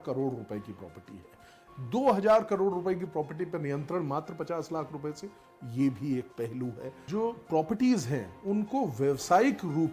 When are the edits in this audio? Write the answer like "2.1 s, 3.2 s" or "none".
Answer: 6.9 s